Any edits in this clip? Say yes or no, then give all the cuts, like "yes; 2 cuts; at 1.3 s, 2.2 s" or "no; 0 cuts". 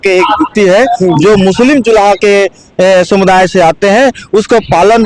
no; 0 cuts